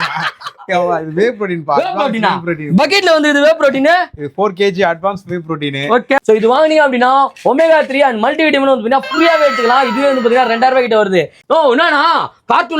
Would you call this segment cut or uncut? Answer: cut